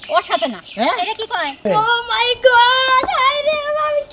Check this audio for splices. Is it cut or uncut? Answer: cut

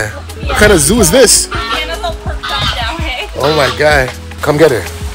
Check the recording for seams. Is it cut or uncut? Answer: cut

